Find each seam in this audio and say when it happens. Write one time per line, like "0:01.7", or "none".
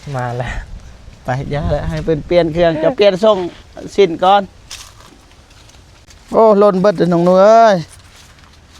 0:06.1